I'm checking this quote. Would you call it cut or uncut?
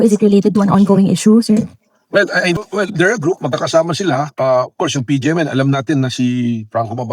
cut